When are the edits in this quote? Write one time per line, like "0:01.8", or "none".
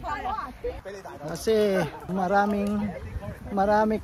0:00.9
0:02.0